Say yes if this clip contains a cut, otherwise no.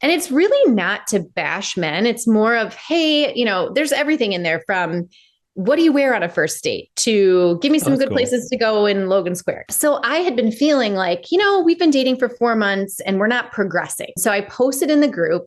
yes